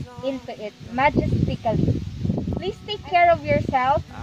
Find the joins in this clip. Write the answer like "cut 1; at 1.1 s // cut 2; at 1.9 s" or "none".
cut 1; at 2.6 s